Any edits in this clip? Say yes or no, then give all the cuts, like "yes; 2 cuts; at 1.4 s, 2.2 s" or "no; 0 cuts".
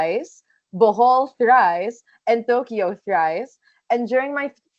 no; 0 cuts